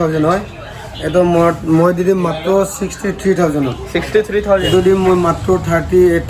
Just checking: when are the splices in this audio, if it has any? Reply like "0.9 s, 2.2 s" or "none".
4.6 s